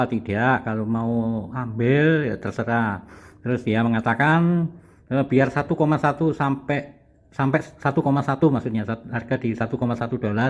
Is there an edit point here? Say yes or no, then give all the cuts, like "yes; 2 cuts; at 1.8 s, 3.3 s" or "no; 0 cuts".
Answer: no; 0 cuts